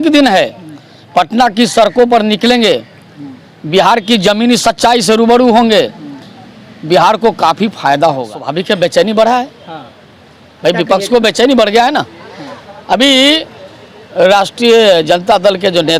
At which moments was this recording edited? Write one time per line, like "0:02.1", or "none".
0:08.3